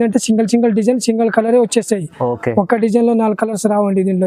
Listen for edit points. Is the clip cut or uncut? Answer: uncut